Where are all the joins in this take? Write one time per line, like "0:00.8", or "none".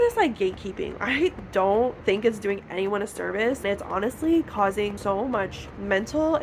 0:01.0
0:03.6
0:05.0